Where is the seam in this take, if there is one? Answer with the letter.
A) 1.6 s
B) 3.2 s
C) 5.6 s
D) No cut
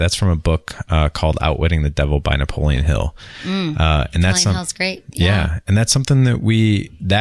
D